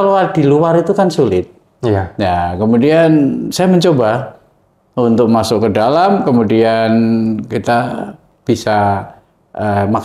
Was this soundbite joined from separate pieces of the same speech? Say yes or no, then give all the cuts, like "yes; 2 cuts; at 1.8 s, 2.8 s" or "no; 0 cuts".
no; 0 cuts